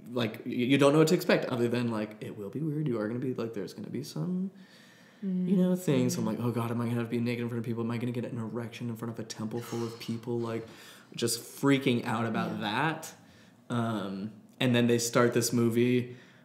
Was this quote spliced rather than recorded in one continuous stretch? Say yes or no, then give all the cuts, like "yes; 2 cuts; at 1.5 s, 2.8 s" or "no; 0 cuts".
no; 0 cuts